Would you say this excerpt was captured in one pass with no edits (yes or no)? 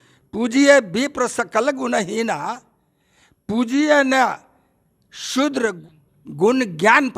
no